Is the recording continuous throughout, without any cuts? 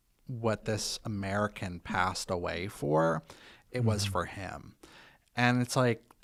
yes; 0 cuts

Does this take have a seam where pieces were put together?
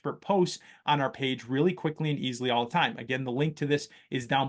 no; 0 cuts

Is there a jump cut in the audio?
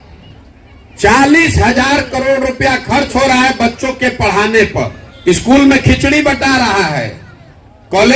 yes; 1 cut; at 5.0 s

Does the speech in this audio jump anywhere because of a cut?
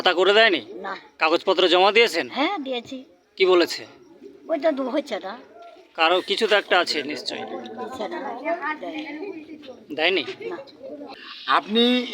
yes; 1 cut; at 11.1 s

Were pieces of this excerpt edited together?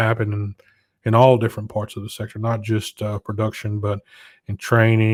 no; 0 cuts

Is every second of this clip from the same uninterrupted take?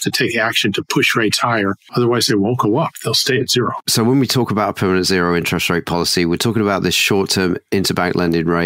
yes; 0 cuts

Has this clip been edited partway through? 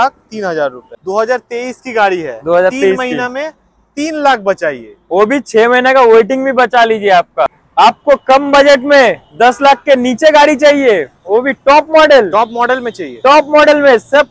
yes; 2 cuts; at 1.0 s, 7.5 s

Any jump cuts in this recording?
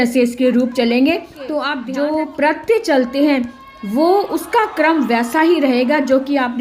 yes; 1 cut; at 1.7 s

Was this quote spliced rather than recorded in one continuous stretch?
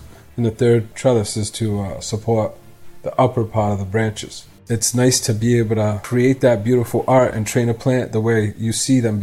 yes; 3 cuts; at 0.9 s, 4.5 s, 6.0 s

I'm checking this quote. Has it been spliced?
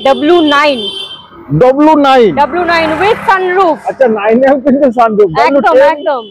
no; 0 cuts

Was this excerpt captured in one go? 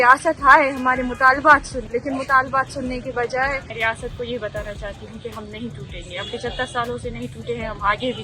no; 2 cuts; at 1.8 s, 3.7 s

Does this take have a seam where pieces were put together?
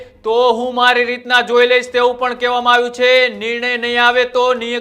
no; 0 cuts

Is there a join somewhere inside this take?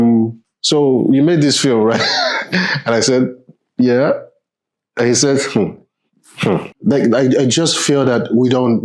yes; 1 cut; at 6.8 s

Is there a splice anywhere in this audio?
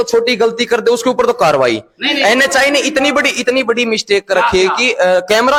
no; 0 cuts

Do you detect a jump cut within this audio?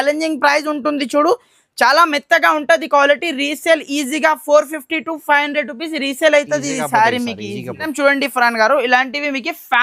no; 0 cuts

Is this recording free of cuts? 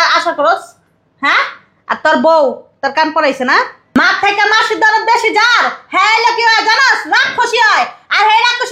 no; 1 cut; at 4.0 s

